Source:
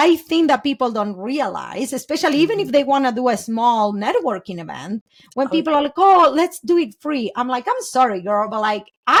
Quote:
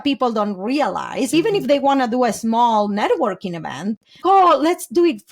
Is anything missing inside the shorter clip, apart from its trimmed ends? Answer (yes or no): yes